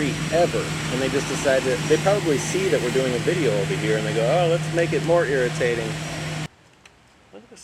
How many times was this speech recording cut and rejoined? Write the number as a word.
one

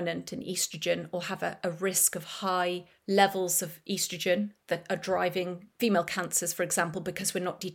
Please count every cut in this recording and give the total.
one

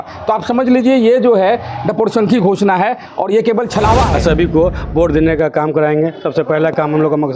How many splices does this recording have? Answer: one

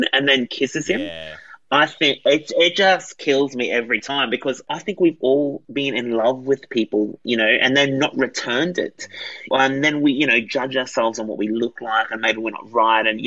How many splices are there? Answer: two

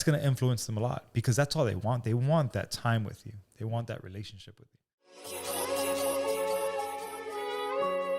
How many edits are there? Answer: one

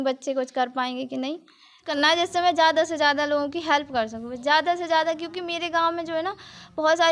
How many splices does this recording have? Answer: one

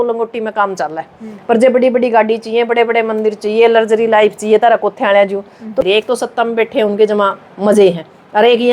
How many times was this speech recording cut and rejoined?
one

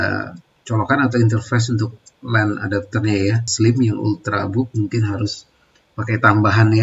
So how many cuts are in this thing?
one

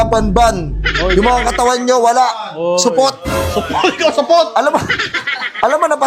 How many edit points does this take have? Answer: zero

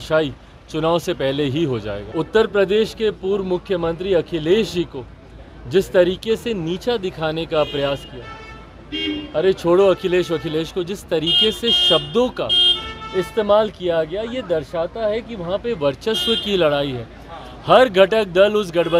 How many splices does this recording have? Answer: one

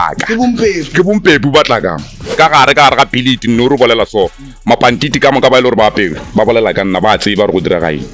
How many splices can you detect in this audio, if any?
one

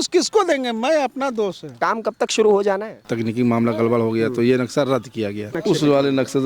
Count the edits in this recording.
three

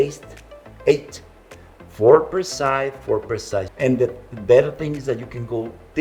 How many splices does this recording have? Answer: one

